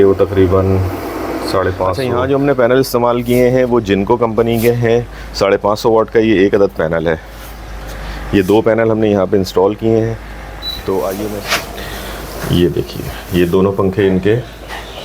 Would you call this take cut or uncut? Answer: cut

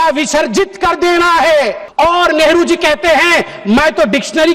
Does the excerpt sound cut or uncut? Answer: cut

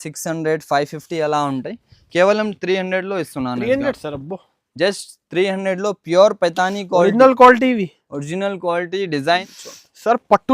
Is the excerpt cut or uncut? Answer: cut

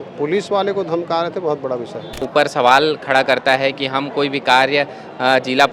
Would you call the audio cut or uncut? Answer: cut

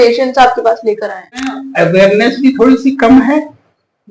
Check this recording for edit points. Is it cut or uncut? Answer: cut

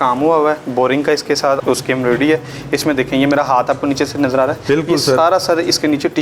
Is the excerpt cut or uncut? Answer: cut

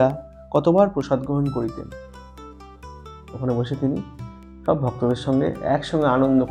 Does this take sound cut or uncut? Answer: uncut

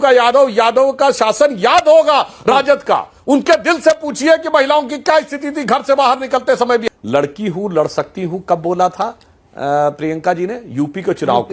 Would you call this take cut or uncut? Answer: cut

